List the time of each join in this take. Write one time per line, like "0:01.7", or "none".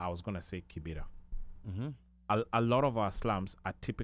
none